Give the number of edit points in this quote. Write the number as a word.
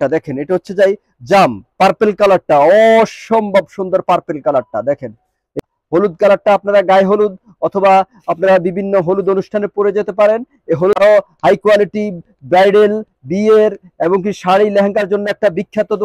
two